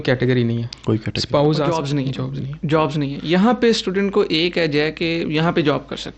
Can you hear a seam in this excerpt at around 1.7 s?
yes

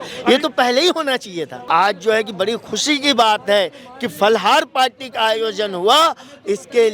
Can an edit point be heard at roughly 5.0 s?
no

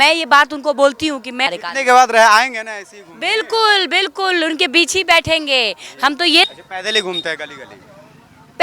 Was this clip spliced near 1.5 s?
yes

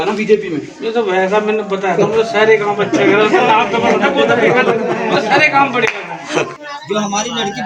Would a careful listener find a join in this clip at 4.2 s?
no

